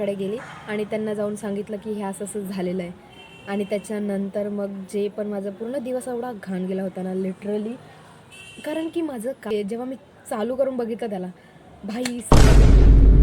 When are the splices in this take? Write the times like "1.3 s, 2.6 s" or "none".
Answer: 9.5 s